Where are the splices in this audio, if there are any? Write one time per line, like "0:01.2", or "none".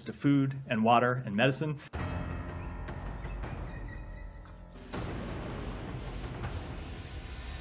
0:02.0